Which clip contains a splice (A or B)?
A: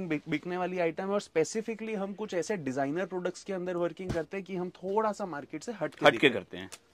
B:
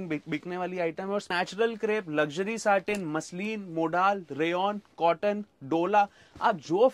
B